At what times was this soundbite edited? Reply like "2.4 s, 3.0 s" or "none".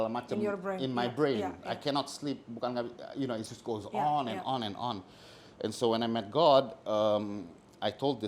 none